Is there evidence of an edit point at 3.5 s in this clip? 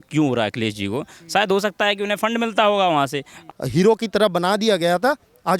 yes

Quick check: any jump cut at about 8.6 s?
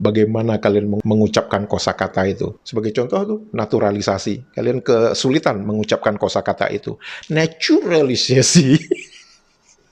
no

